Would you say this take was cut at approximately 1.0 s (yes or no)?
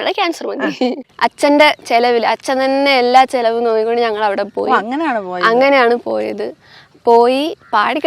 yes